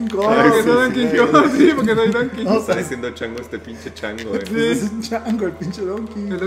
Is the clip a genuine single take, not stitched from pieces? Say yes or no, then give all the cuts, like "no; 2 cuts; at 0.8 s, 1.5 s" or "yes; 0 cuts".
yes; 0 cuts